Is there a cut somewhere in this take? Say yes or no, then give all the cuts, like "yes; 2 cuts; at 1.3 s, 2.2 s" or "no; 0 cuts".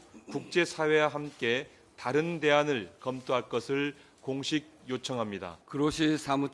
yes; 1 cut; at 5.6 s